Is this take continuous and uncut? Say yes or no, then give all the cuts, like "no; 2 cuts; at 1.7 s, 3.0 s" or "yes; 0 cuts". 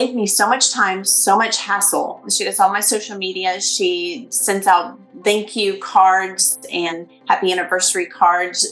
no; 2 cuts; at 2.3 s, 6.9 s